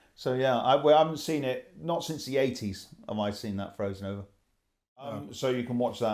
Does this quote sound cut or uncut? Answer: cut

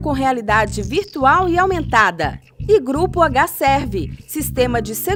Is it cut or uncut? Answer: uncut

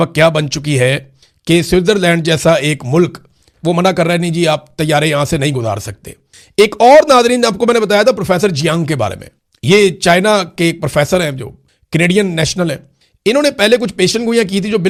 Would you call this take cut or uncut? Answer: uncut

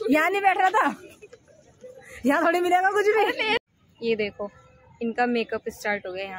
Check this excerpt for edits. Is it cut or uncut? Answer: cut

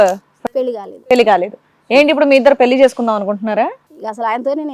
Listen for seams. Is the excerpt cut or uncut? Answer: uncut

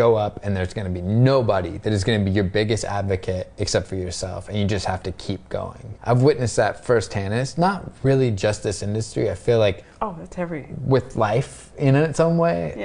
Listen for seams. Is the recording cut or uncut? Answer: cut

